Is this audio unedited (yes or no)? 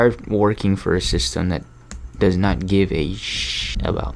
yes